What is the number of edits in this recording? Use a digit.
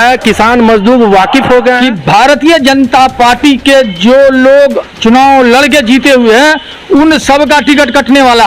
1